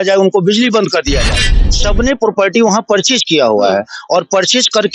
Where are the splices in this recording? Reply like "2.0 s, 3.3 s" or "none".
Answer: 1.6 s